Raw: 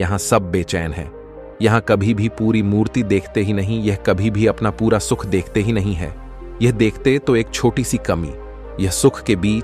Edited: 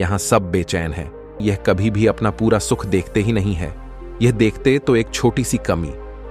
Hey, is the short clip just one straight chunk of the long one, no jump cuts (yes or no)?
no